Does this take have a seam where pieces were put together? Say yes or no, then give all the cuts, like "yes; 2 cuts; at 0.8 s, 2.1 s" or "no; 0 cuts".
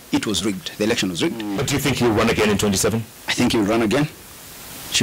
yes; 2 cuts; at 1.6 s, 3.2 s